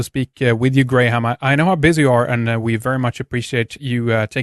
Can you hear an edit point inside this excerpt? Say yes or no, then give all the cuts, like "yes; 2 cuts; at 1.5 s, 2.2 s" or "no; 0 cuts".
no; 0 cuts